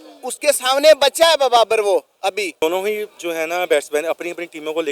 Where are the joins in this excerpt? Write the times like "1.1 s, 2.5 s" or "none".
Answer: 2.6 s